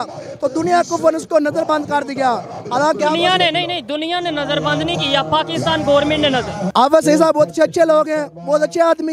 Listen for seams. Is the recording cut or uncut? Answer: cut